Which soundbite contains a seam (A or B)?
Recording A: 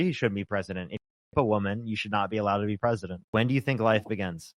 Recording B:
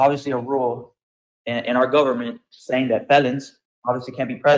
A